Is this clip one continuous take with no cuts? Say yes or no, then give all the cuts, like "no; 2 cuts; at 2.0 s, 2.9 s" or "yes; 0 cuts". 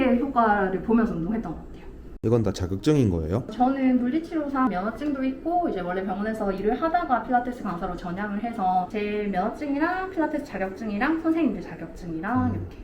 yes; 0 cuts